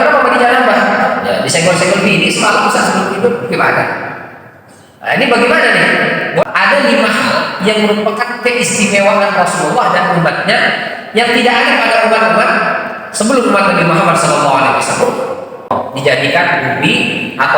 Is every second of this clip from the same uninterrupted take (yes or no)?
no